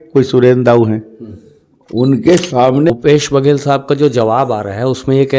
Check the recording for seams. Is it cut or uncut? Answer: cut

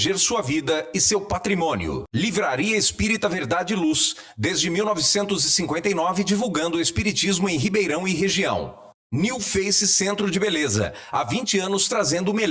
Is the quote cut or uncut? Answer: uncut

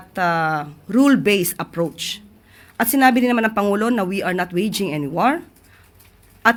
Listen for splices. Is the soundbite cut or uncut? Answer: uncut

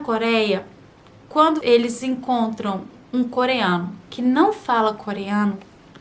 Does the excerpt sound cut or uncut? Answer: cut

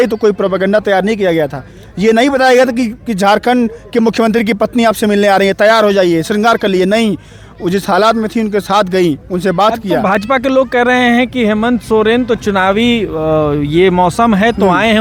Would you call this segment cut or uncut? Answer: uncut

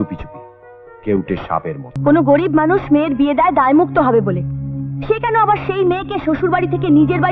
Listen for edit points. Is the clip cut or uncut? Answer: cut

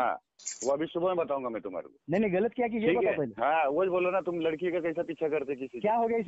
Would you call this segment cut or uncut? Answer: uncut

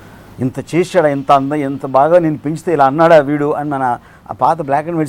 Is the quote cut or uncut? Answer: uncut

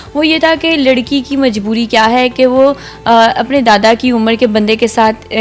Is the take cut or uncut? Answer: uncut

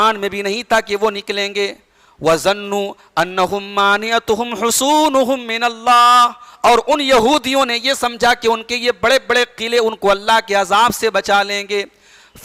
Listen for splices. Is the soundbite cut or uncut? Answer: uncut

